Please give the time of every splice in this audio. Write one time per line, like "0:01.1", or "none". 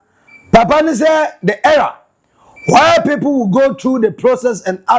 none